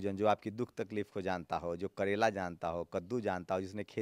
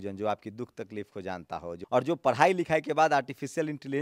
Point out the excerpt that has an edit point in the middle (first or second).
second